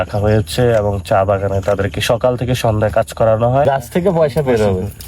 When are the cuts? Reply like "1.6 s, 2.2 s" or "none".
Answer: 3.6 s